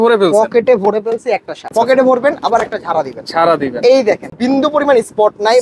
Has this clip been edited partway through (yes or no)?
yes